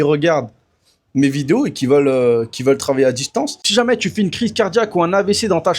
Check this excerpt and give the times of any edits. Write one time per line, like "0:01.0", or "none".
0:03.7